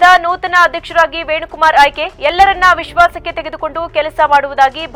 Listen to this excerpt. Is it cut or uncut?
uncut